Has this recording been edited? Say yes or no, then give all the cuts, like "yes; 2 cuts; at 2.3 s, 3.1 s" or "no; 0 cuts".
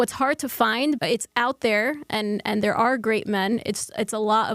yes; 1 cut; at 1.0 s